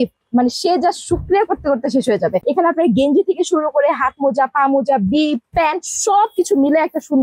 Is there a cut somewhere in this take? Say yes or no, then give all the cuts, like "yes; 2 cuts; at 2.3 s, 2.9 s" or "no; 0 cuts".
no; 0 cuts